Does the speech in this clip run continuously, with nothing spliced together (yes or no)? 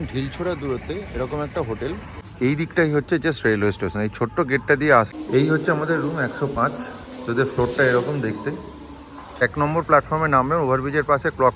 no